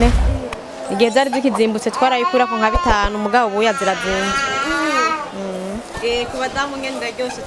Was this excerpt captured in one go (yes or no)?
no